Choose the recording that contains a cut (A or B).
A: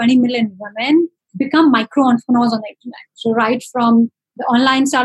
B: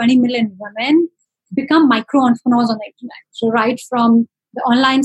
A